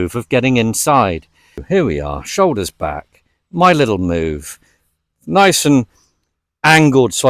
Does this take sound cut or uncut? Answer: cut